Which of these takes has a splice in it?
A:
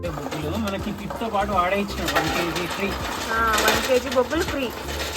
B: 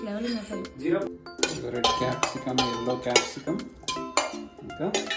B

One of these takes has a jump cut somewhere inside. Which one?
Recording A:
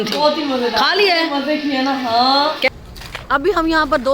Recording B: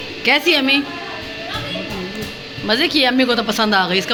A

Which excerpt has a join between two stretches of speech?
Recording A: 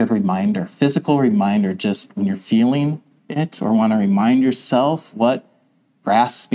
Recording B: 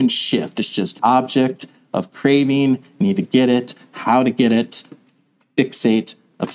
B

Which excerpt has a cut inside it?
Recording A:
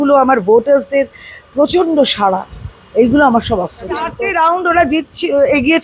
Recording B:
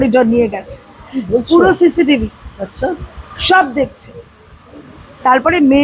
A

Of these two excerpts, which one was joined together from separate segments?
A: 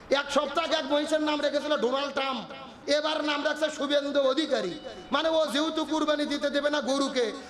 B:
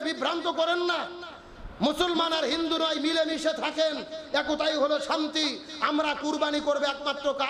A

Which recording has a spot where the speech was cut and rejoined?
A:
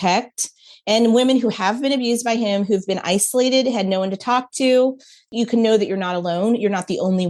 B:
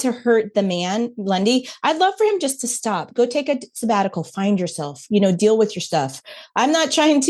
A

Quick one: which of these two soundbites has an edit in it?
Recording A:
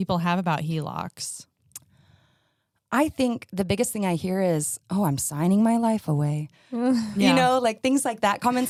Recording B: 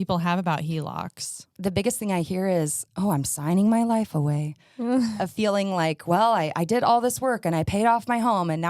B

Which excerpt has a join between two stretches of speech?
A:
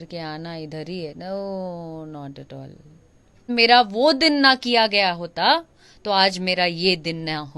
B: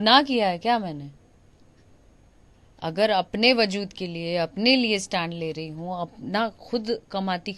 A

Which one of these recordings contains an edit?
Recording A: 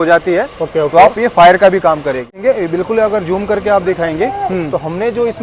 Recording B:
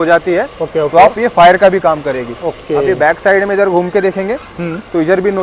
A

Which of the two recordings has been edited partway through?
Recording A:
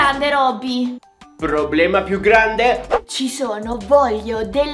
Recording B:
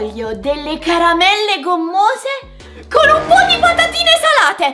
A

